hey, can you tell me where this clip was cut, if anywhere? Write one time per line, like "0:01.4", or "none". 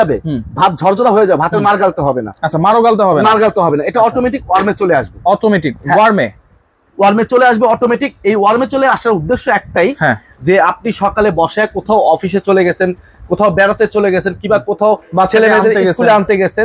none